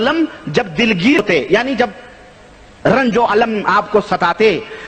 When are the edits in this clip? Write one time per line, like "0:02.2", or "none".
0:01.1